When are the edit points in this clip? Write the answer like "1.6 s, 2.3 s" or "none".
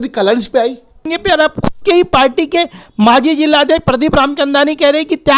1.1 s